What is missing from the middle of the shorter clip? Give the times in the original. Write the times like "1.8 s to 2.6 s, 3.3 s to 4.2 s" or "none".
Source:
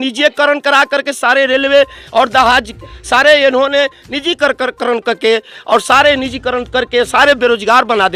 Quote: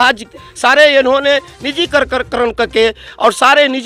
none